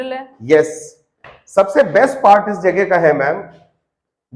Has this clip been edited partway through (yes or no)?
no